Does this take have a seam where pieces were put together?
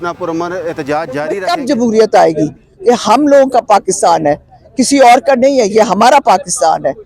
yes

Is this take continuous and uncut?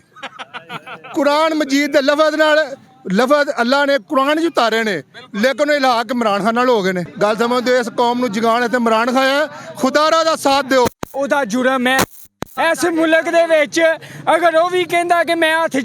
no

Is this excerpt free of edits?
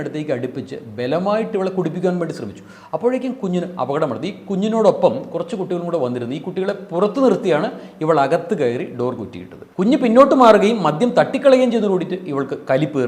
yes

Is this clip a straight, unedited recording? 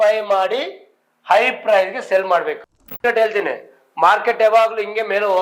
no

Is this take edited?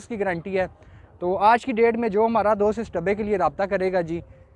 no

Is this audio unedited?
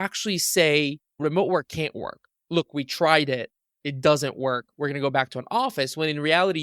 no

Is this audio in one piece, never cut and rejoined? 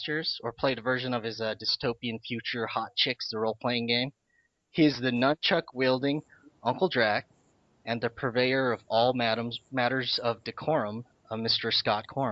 no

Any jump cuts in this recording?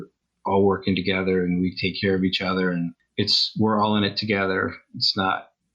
yes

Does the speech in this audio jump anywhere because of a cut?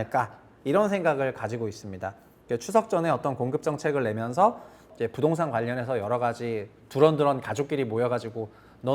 yes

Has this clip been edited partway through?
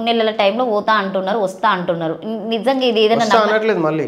no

